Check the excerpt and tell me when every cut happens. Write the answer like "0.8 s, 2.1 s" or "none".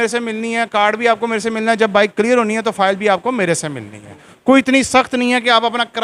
4.3 s